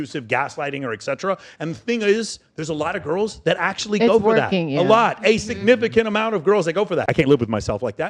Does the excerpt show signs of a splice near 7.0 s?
yes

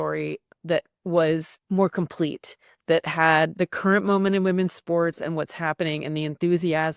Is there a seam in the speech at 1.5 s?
yes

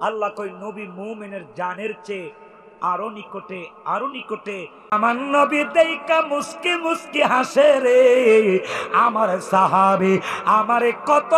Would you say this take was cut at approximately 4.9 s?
yes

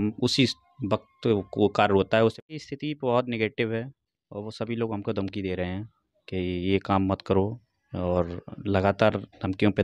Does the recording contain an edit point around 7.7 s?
no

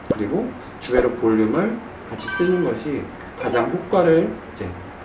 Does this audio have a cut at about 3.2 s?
no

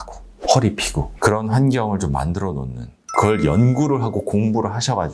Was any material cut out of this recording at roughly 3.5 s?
no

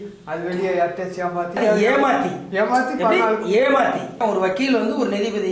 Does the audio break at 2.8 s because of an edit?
no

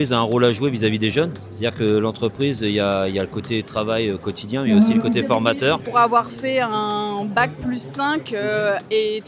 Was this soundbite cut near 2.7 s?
no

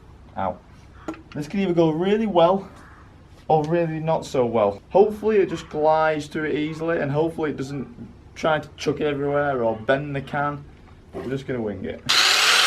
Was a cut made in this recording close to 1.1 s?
no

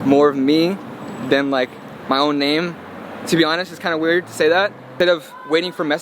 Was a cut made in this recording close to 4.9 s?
yes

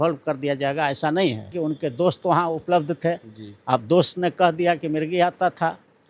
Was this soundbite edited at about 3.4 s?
no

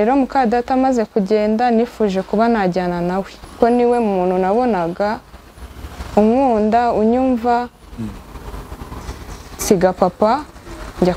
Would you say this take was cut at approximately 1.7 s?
no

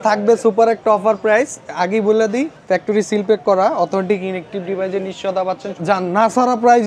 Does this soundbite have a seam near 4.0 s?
no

